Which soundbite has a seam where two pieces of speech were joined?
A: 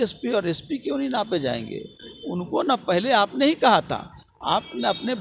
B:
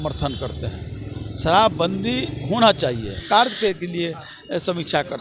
B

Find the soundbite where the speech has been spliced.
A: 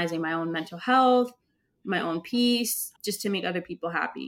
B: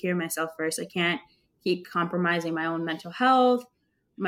A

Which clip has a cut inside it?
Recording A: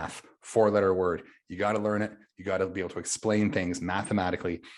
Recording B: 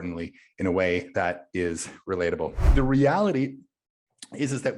B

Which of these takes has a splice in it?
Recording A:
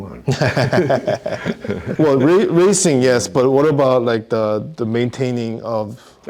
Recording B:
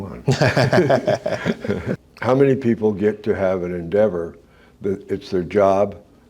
B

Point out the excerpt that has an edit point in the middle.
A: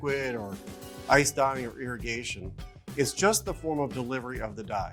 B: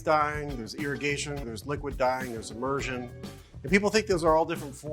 B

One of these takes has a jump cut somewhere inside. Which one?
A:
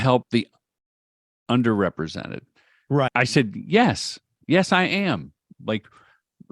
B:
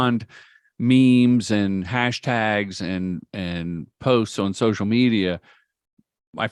A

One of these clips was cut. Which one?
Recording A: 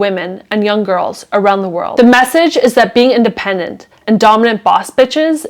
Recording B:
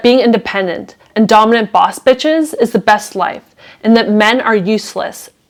A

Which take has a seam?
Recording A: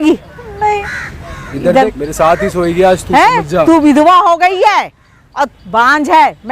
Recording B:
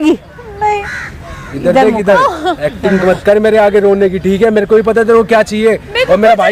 A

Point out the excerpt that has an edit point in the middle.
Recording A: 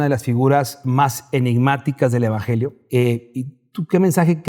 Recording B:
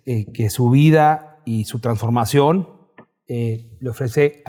A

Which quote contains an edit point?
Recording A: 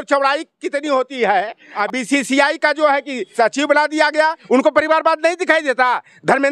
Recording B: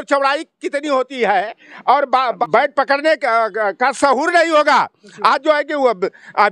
A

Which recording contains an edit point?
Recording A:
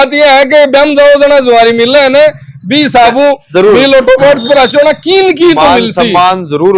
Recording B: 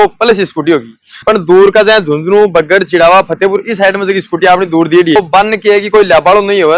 B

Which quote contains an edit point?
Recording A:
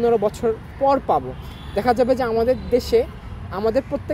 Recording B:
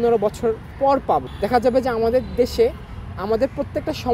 B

